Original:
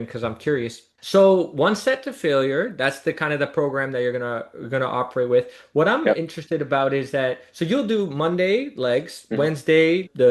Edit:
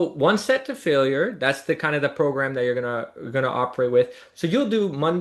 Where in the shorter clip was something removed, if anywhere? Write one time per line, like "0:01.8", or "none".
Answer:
0:04.2